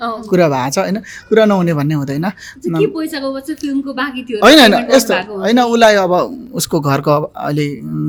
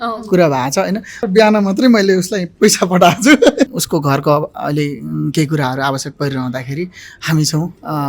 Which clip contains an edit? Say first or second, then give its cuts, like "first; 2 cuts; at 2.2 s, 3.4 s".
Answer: second; 2 cuts; at 1.2 s, 3.8 s